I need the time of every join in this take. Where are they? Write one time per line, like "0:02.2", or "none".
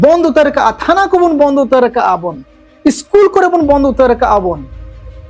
none

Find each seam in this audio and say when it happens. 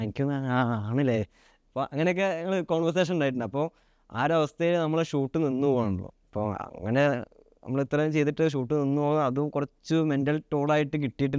none

